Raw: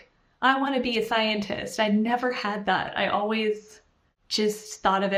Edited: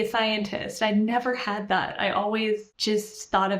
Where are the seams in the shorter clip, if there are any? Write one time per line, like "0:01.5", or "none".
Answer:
0:02.7

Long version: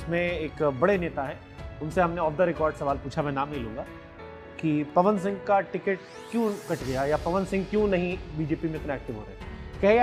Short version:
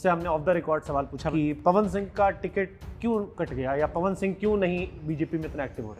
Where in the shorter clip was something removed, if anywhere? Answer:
0:01.3

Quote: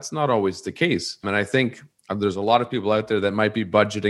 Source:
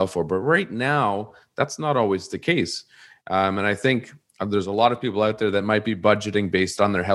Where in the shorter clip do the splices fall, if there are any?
0:01.2

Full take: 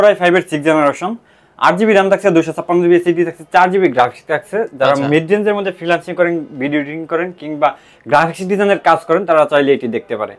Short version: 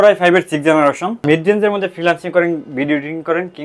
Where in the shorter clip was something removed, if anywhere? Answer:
0:01.2

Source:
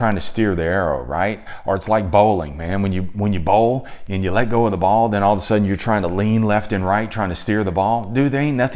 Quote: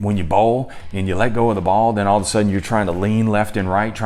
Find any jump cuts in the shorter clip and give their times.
none

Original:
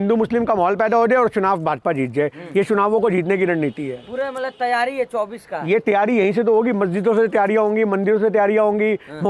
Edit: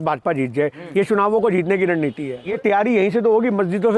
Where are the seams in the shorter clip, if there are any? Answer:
0:02.5

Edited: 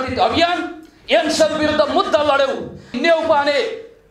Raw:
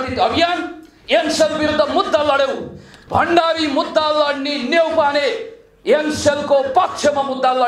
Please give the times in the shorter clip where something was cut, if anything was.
0:02.9

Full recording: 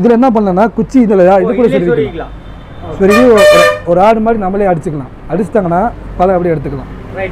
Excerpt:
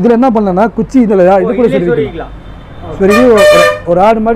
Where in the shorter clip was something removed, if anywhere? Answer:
none

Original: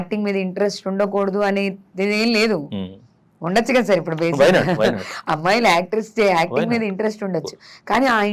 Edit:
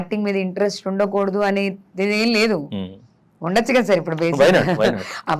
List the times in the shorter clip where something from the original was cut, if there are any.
none

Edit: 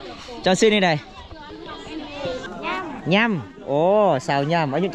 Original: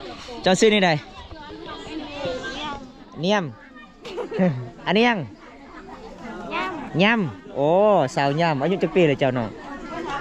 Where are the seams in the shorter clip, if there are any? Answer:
0:02.5

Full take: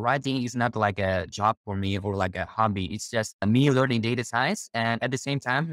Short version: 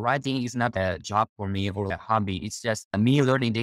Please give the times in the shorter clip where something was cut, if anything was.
0:00.7
0:01.9

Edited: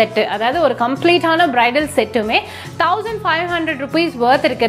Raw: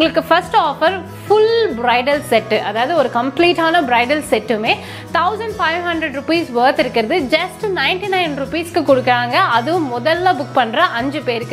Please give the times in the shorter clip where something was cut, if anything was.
none

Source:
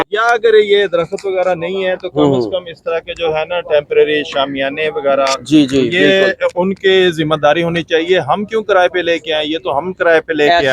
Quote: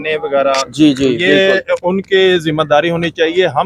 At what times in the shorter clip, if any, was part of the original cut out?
none

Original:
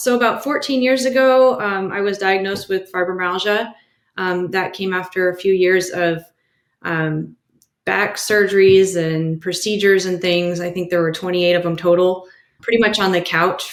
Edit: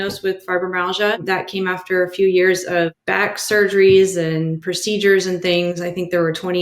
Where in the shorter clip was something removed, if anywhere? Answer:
0:01.2
0:03.0

